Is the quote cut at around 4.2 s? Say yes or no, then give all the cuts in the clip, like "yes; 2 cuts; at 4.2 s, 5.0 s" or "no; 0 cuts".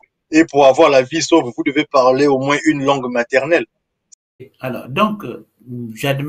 yes; 1 cut; at 4.2 s